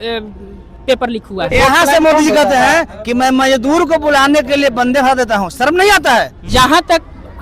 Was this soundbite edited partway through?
yes; 2 cuts; at 1.5 s, 6.5 s

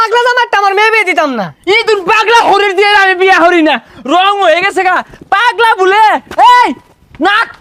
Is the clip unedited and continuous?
yes; 0 cuts

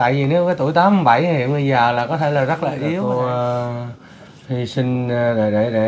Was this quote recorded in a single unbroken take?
no; 1 cut; at 3.0 s

